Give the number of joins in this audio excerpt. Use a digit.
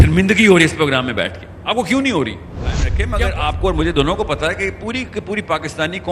1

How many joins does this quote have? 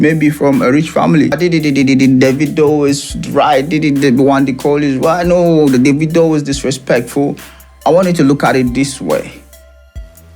1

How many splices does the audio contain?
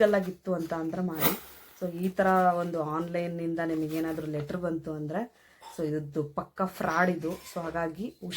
1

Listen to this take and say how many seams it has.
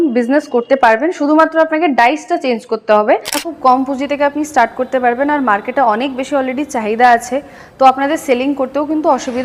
1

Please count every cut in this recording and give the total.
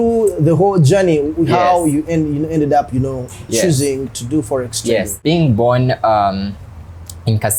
0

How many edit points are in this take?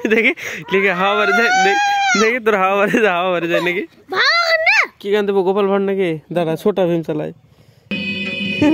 3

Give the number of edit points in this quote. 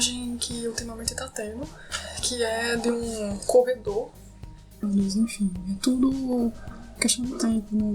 1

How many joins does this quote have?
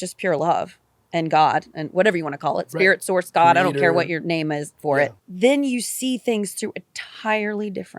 1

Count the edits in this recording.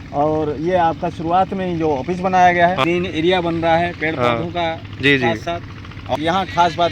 2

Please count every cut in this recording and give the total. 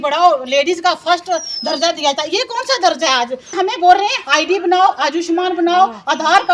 1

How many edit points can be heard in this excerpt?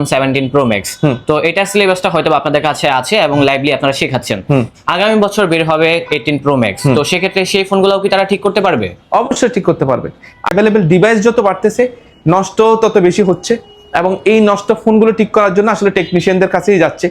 1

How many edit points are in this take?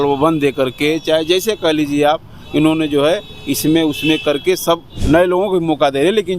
1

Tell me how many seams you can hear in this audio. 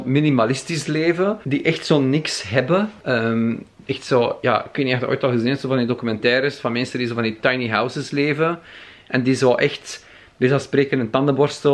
2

